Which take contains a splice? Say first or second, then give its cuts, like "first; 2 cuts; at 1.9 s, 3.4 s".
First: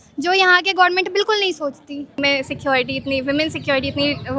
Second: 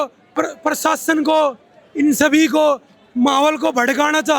first; 1 cut; at 2.2 s